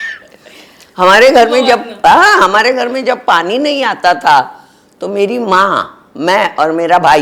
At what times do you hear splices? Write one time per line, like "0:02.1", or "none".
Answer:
none